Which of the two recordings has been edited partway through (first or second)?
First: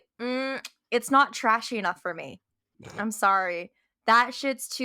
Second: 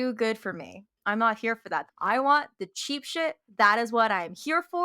second